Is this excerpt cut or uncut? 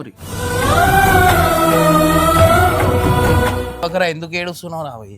cut